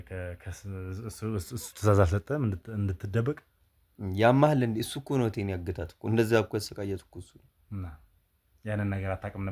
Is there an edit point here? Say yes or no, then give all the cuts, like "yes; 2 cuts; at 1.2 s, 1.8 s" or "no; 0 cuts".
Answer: no; 0 cuts